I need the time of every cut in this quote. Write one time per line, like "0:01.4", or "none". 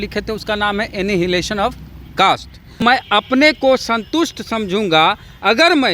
0:03.1